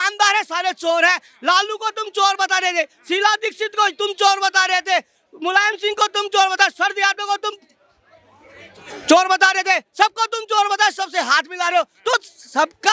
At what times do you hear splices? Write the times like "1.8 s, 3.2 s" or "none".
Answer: none